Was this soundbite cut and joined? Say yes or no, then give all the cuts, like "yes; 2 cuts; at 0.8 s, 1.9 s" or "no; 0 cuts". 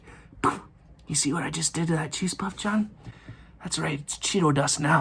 no; 0 cuts